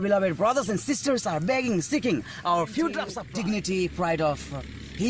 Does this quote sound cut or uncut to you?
cut